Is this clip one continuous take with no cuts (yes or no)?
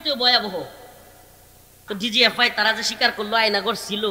no